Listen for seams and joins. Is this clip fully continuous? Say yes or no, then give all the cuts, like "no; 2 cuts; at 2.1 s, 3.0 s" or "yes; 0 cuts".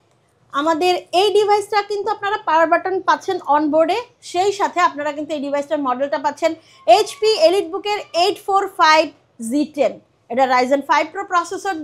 yes; 0 cuts